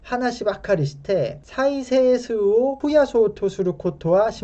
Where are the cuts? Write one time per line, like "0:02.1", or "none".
0:02.8